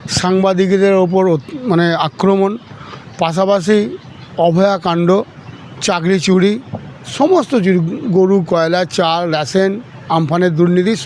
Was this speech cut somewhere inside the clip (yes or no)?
no